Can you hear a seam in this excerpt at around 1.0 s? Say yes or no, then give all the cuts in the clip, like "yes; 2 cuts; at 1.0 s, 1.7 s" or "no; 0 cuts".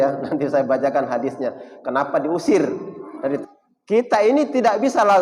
no; 1 cut; at 3.4 s